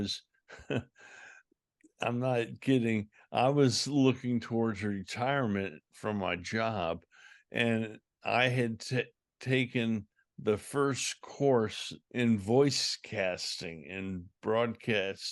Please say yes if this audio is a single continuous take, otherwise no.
no